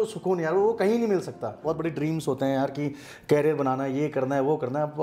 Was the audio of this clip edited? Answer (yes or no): yes